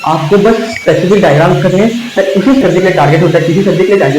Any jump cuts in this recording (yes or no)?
yes